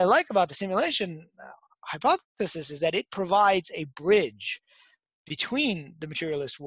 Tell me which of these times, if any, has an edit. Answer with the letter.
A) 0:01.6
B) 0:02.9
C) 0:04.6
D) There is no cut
D